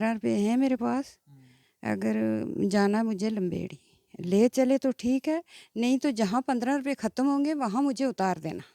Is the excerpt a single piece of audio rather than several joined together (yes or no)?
yes